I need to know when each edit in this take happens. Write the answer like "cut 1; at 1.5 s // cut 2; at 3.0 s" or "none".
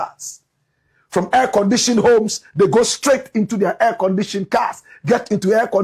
none